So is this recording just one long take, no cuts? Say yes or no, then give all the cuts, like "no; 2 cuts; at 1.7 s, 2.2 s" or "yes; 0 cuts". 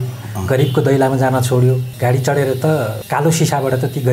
no; 2 cuts; at 1.9 s, 3.0 s